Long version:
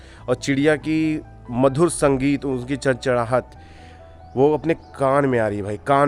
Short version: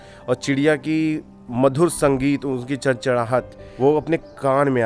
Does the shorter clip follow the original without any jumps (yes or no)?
no